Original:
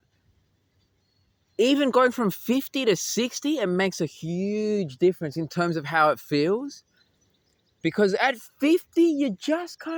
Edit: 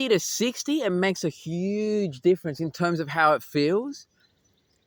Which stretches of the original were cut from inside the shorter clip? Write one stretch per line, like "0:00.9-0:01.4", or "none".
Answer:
none